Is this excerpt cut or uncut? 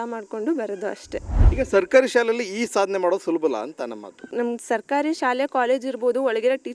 cut